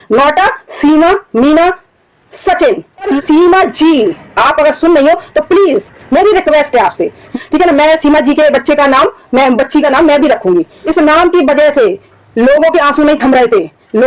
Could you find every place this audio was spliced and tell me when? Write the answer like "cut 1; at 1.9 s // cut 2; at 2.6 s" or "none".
cut 1; at 3.1 s // cut 2; at 7.3 s // cut 3; at 10.8 s